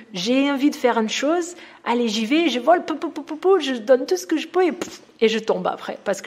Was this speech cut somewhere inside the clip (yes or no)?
no